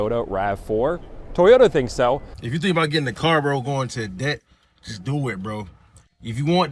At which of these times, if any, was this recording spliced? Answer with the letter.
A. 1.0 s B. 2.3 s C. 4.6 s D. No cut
B